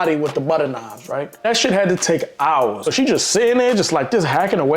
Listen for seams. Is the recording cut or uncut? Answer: cut